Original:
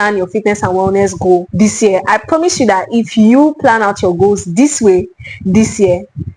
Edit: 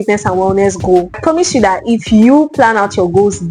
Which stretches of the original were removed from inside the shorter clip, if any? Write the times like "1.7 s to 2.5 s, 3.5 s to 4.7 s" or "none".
1.5 s to 2.2 s